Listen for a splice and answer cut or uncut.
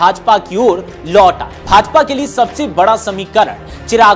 cut